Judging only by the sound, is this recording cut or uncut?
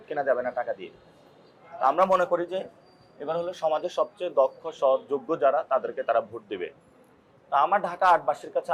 uncut